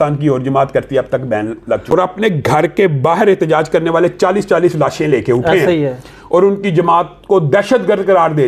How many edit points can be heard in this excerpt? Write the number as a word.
one